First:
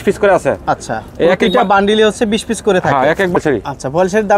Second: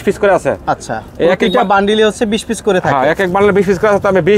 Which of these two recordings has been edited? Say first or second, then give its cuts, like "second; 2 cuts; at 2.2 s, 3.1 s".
first; 1 cut; at 3.4 s